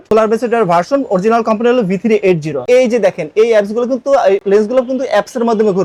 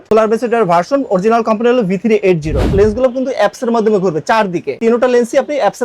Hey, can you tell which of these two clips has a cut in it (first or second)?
second